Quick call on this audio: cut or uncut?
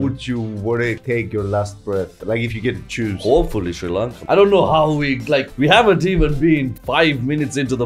cut